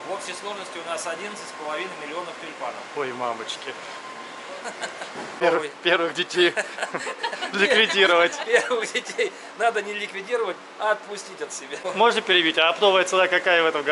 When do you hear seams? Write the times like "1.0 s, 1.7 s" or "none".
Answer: 5.4 s, 11.8 s